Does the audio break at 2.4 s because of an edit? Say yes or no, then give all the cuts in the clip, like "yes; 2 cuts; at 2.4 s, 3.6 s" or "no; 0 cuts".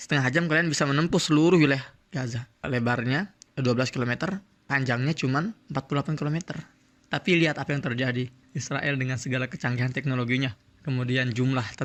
no; 0 cuts